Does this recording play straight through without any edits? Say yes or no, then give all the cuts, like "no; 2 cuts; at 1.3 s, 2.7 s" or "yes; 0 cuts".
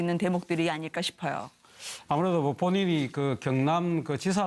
no; 1 cut; at 1.1 s